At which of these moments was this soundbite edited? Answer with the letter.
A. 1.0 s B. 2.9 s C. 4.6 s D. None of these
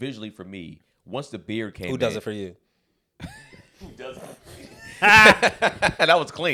D